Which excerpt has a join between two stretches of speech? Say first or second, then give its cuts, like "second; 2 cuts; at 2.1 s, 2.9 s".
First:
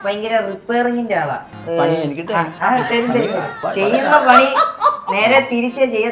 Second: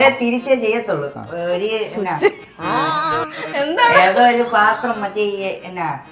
first; 2 cuts; at 1.5 s, 3.6 s